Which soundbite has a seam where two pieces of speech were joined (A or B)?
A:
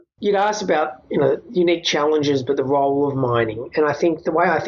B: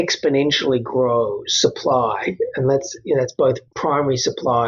B